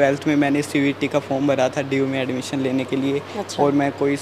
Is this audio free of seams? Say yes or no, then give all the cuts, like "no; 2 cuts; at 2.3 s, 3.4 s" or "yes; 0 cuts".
yes; 0 cuts